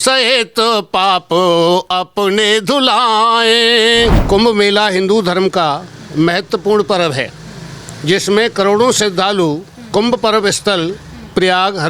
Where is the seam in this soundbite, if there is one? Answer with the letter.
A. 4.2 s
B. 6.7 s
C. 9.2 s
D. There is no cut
A